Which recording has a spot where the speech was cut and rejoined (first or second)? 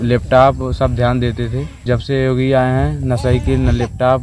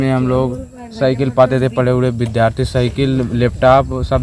first